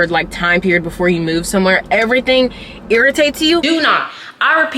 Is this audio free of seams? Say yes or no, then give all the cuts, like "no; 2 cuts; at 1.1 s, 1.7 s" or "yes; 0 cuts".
no; 1 cut; at 3.6 s